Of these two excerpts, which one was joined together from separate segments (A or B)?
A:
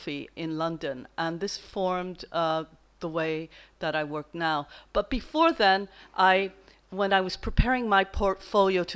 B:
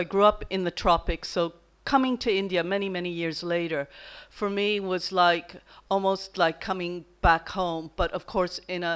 B